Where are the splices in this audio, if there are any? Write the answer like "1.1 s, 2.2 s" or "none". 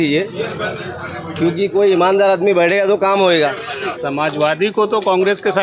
3.9 s